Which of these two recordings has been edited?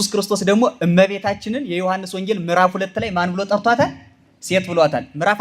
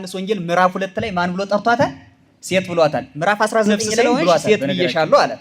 second; 1 cut; at 4.4 s

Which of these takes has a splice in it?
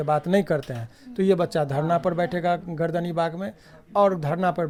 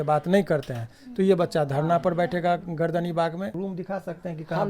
second; 1 cut; at 3.6 s

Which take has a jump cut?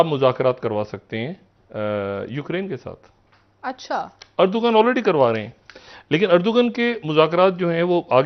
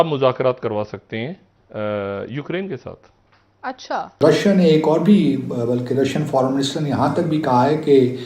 second; 1 cut; at 4.2 s

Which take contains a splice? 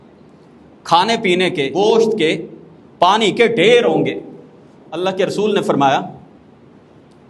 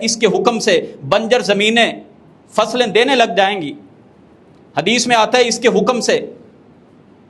first; 1 cut; at 1.7 s

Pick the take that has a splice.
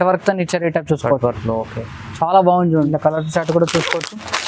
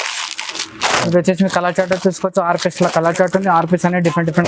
first; 1 cut; at 2.9 s

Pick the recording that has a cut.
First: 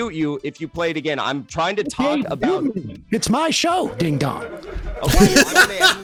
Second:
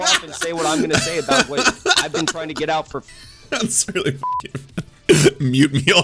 second; 1 cut; at 3.0 s

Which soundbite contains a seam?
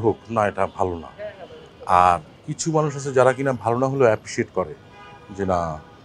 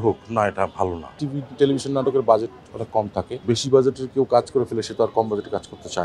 second; 2 cuts; at 1.1 s, 3.4 s

